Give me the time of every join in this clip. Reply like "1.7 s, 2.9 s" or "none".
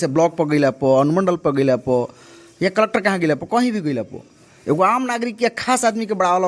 none